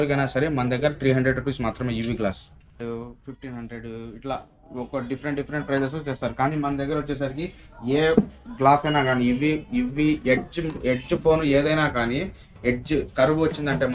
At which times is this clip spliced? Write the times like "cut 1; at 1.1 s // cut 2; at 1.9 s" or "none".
cut 1; at 2.7 s